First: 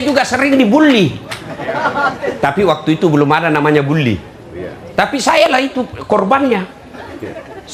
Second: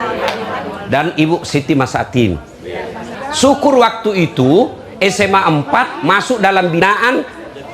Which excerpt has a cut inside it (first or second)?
second